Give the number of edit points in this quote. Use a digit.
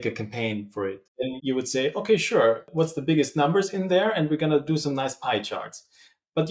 2